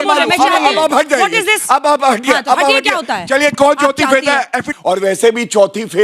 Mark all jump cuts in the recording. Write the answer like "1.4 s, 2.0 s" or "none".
4.6 s